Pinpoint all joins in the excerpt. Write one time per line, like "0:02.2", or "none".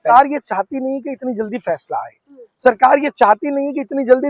none